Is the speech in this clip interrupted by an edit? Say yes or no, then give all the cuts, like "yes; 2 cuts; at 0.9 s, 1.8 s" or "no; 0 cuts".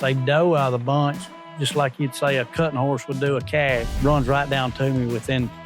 yes; 1 cut; at 3.9 s